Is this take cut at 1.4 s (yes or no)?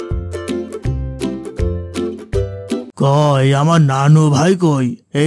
no